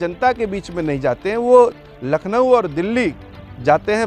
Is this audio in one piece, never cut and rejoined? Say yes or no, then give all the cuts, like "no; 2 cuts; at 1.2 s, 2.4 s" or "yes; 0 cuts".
yes; 0 cuts